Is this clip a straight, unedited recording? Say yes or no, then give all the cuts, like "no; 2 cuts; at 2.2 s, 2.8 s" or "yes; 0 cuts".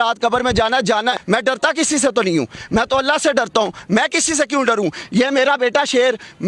no; 1 cut; at 1.2 s